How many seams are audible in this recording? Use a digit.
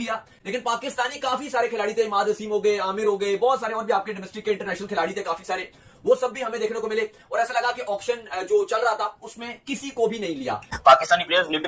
1